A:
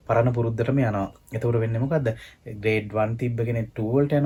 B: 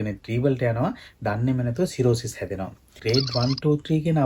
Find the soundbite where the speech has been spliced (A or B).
B